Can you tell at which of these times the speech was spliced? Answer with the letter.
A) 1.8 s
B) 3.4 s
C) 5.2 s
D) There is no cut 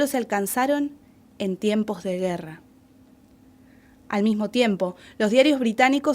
B